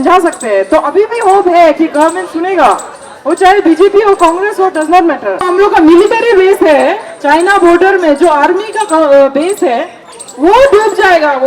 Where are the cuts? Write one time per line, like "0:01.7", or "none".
0:05.4